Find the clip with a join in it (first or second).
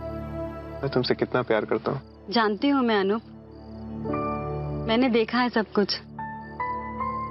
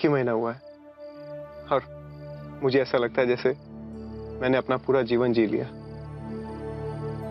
first